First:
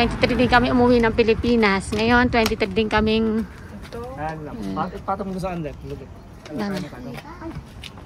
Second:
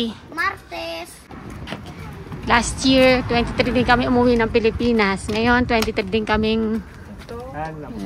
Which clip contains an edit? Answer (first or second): second